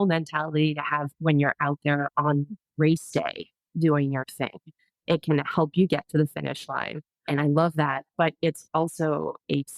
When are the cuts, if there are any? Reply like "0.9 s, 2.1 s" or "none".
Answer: 7.3 s